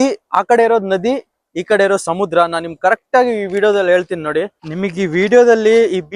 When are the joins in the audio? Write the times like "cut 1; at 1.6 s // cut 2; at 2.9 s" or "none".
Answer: cut 1; at 4.7 s